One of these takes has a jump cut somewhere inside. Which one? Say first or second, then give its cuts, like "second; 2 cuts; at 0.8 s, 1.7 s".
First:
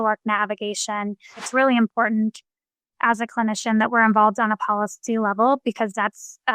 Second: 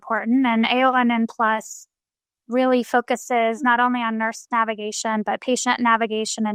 first; 1 cut; at 1.5 s